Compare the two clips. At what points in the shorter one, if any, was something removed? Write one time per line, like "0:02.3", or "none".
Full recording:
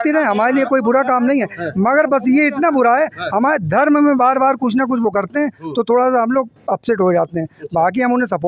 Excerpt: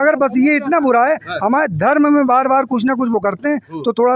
none